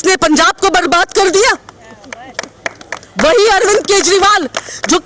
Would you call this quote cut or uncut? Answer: uncut